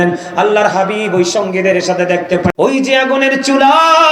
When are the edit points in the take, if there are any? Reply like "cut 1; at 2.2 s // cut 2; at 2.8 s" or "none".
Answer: cut 1; at 2.5 s